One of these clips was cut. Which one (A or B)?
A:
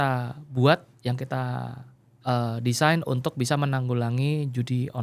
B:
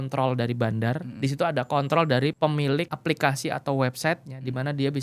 B